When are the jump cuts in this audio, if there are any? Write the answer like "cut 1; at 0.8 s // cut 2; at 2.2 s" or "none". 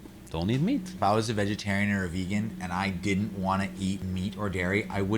cut 1; at 0.9 s // cut 2; at 4.0 s